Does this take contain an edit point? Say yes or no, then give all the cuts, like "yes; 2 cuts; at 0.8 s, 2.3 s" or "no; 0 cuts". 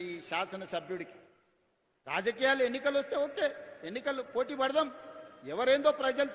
no; 0 cuts